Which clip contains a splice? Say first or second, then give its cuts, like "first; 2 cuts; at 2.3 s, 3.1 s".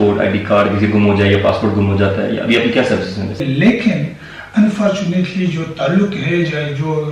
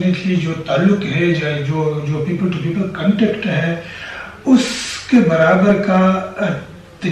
first; 1 cut; at 3.4 s